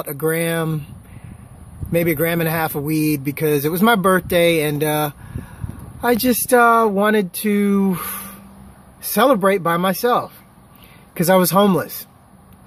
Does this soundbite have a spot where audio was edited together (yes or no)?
no